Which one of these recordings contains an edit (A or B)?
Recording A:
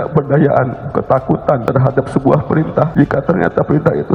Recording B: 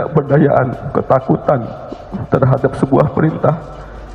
A